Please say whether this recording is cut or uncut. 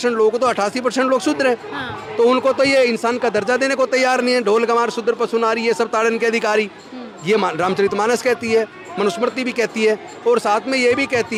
uncut